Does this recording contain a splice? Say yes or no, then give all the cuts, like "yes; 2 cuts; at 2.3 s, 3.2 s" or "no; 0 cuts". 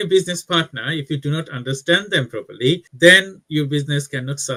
no; 0 cuts